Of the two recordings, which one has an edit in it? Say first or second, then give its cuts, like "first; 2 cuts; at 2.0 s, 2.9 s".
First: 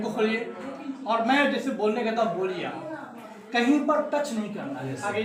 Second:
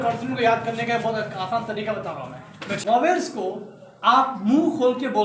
second; 1 cut; at 2.8 s